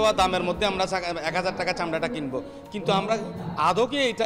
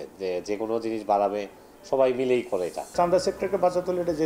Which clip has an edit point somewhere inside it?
second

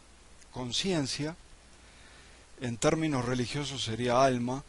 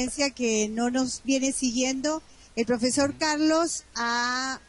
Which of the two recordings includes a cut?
second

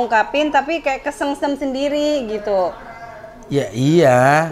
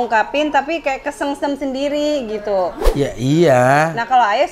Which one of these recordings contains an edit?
second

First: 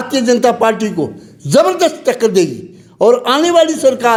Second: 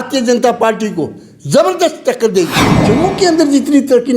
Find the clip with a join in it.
second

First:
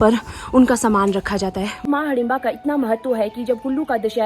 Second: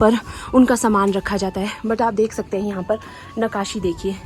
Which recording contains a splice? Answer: first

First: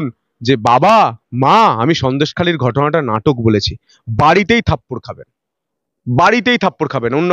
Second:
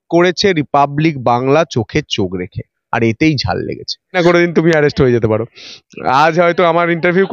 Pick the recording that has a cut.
second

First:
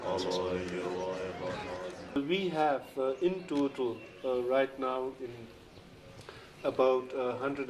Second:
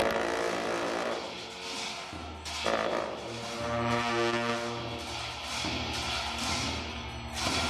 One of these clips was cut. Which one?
first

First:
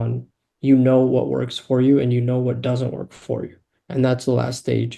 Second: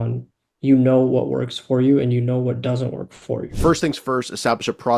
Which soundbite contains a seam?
second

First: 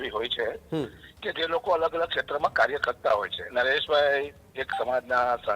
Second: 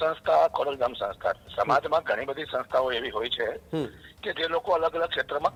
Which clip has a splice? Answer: first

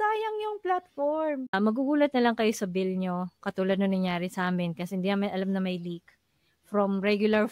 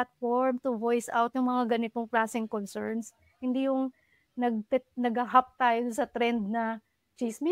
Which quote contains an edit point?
first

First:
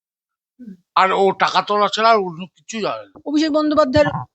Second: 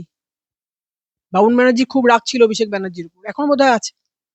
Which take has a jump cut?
first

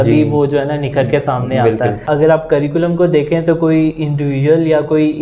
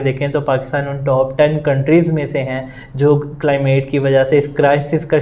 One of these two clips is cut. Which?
first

